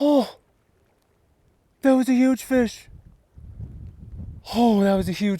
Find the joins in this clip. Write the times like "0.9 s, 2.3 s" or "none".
4.4 s